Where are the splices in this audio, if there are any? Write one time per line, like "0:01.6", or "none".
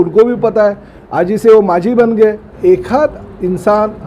0:02.5